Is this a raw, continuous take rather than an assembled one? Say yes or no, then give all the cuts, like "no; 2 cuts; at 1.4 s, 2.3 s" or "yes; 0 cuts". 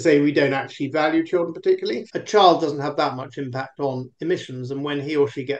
no; 1 cut; at 2.1 s